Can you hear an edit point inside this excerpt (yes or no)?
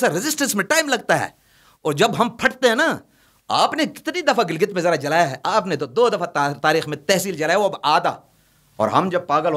no